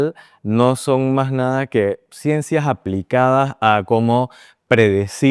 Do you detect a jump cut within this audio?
no; 0 cuts

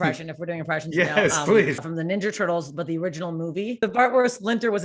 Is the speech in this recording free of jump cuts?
no; 2 cuts; at 1.8 s, 3.8 s

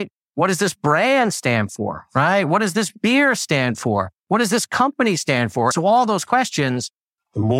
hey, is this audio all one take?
no; 1 cut; at 5.7 s

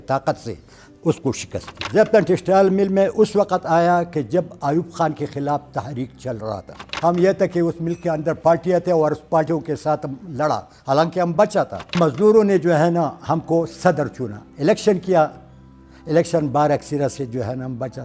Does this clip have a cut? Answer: yes; 3 cuts; at 1.8 s, 6.8 s, 12.0 s

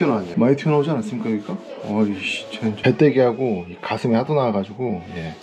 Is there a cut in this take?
yes; 1 cut; at 2.8 s

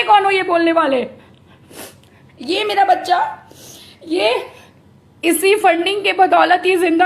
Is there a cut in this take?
no; 0 cuts

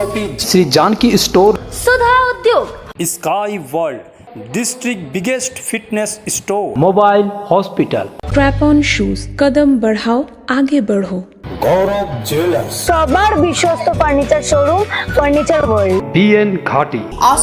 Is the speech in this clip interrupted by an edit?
no; 0 cuts

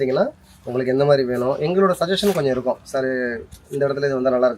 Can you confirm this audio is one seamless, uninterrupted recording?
yes; 0 cuts

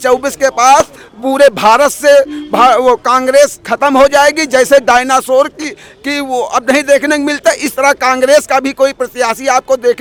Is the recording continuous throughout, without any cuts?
yes; 0 cuts

